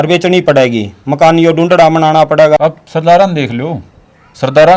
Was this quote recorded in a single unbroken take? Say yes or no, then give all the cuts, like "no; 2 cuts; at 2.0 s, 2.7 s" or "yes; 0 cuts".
no; 1 cut; at 2.6 s